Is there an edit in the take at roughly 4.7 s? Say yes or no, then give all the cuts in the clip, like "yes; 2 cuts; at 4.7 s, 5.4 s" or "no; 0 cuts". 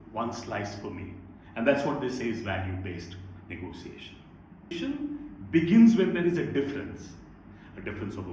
yes; 1 cut; at 4.7 s